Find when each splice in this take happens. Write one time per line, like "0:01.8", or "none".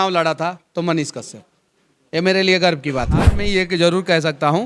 0:03.3